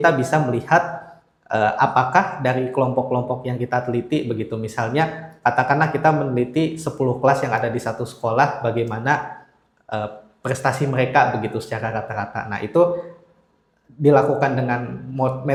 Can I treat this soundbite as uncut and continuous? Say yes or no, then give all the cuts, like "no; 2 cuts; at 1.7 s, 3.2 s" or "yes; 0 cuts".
yes; 0 cuts